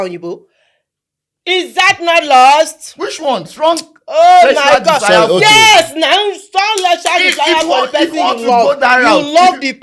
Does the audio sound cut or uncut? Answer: uncut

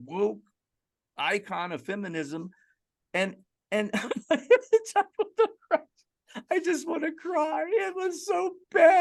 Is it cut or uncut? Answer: uncut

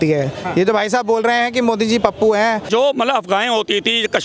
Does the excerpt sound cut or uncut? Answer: cut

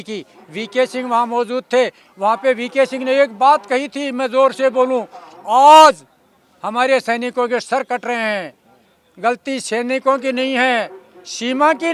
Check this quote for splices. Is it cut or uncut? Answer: uncut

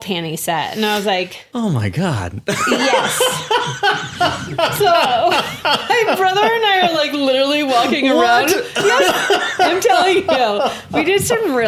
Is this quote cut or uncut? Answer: uncut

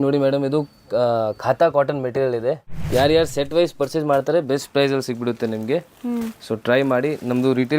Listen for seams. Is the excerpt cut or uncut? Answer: cut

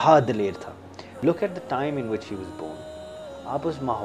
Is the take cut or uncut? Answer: cut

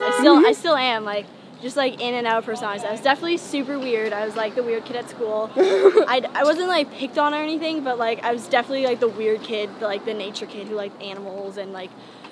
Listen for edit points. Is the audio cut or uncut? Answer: uncut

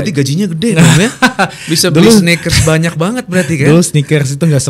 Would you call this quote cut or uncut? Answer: uncut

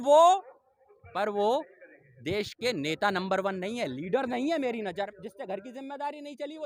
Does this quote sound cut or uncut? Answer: cut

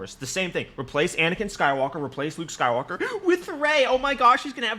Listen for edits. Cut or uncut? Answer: uncut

